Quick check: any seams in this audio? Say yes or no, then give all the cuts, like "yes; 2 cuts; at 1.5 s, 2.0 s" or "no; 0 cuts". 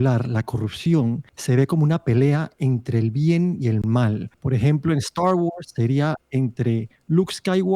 yes; 2 cuts; at 1.3 s, 4.3 s